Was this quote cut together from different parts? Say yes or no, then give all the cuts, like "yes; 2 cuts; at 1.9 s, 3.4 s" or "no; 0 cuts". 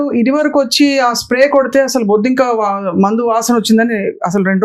no; 0 cuts